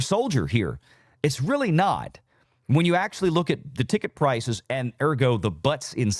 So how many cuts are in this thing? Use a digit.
0